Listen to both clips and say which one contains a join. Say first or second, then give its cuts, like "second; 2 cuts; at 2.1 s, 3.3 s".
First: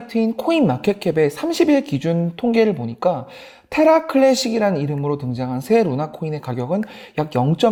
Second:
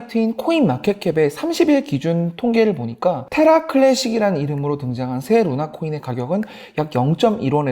second; 1 cut; at 3.2 s